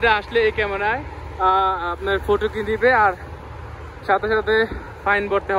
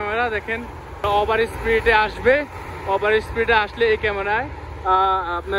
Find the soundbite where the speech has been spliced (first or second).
second